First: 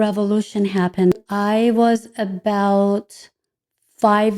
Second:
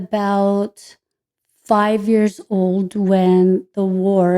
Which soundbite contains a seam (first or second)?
first